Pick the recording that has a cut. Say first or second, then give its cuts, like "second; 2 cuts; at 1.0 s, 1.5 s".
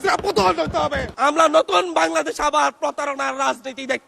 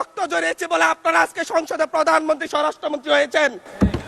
first; 1 cut; at 1.1 s